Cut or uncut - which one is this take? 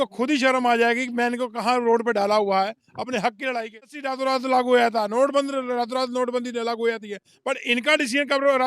cut